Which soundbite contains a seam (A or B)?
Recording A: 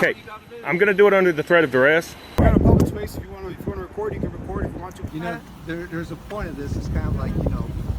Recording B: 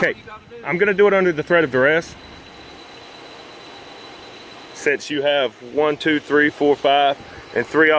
A